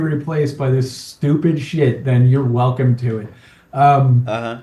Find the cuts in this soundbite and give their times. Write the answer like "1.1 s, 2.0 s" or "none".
none

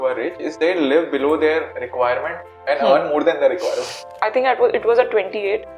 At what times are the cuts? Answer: 4.1 s

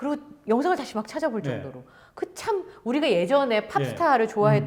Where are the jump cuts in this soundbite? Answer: none

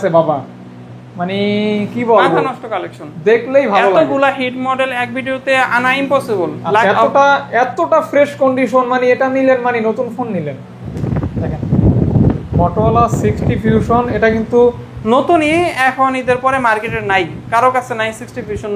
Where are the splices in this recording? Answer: 6.8 s, 10.9 s

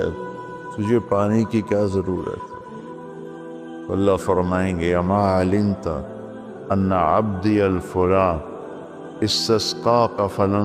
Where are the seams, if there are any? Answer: 2.4 s, 3.9 s

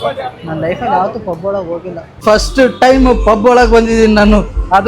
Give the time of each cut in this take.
2.1 s

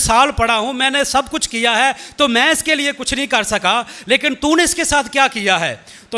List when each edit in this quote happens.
none

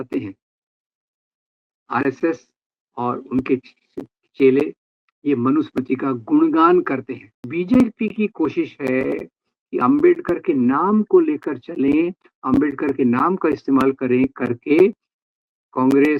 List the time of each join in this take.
7.5 s

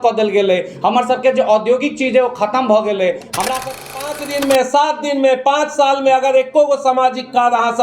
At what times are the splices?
3.8 s

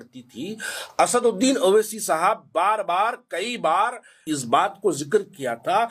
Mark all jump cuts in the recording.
4.2 s

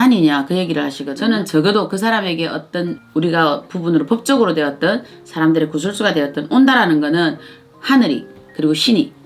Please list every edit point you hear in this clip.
1.0 s, 3.0 s

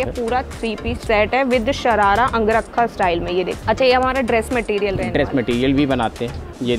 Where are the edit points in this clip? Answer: 1.0 s, 3.6 s

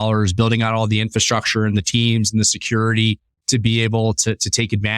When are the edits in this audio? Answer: none

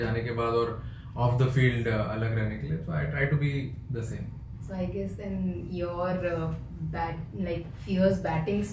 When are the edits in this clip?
none

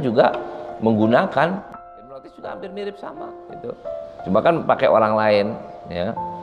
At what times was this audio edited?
1.7 s

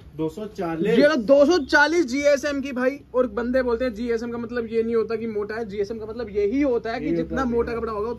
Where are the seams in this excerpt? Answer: none

